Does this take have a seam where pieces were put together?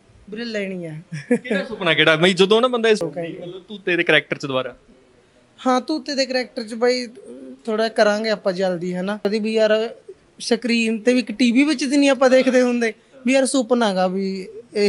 yes; 2 cuts; at 3.0 s, 9.2 s

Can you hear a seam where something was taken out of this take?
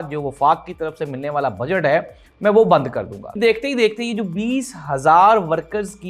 yes; 1 cut; at 3.3 s

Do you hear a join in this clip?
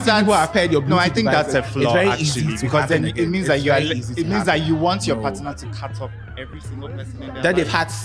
no; 0 cuts

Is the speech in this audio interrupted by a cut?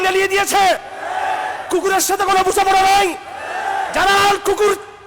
yes; 1 cut; at 0.9 s

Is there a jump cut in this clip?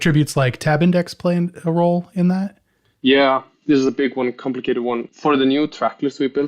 yes; 1 cut; at 5.1 s

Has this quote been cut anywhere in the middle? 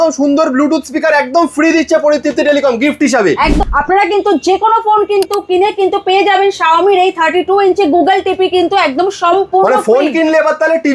yes; 1 cut; at 3.6 s

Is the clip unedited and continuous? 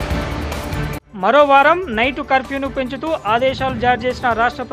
no; 1 cut; at 1.0 s

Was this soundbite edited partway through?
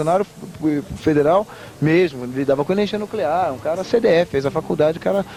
no; 0 cuts

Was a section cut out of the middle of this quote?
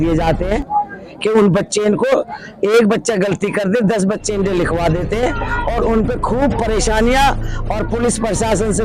no; 0 cuts

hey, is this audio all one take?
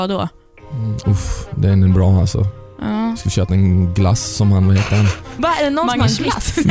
no; 1 cut; at 5.3 s

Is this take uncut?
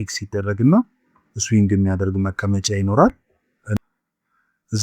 no; 1 cut; at 3.6 s

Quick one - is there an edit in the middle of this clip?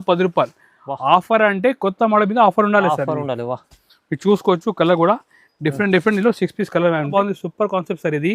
yes; 1 cut; at 7.1 s

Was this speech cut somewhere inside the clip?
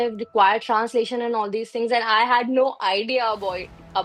no; 0 cuts

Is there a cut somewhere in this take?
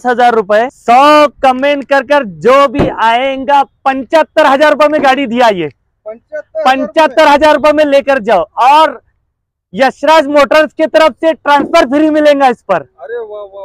no; 0 cuts

